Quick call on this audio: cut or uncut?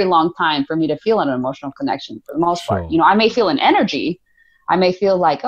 uncut